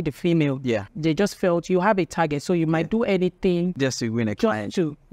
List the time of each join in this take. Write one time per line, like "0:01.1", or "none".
0:00.9
0:03.7